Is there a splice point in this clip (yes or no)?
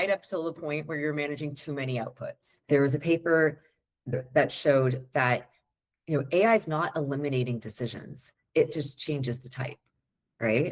yes